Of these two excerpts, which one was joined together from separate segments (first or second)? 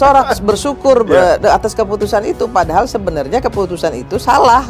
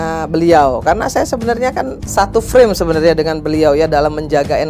second